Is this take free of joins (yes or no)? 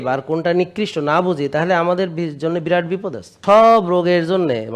no